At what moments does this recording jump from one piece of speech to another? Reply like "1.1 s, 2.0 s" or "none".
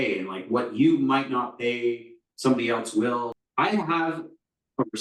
3.3 s